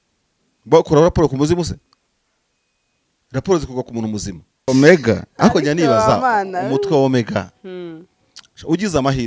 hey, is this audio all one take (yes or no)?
no